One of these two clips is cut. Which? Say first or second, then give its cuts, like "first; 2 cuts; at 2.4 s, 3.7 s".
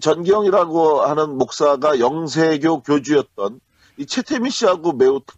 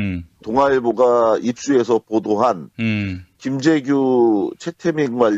first; 1 cut; at 1.5 s